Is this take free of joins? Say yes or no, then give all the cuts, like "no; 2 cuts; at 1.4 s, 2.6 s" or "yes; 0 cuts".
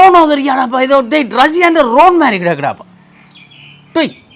yes; 0 cuts